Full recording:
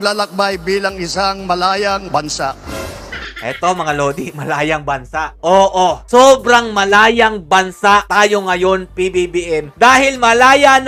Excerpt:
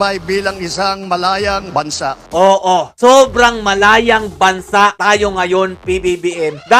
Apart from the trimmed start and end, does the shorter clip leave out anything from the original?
yes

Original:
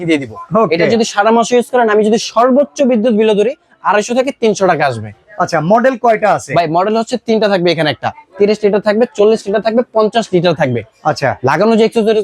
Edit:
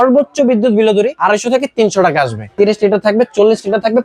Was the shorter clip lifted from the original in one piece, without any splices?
no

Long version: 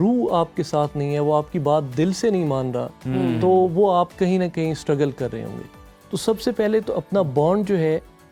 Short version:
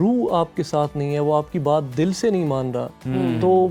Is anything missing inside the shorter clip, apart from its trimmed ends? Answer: no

